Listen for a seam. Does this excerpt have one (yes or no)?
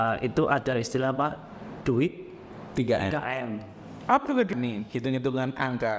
yes